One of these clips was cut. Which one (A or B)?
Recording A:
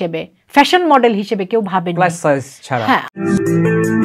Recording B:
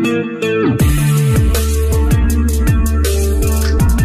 A